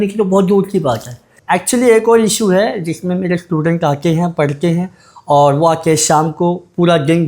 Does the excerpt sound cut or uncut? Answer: cut